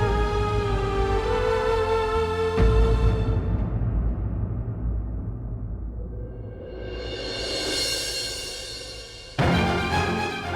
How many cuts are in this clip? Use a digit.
1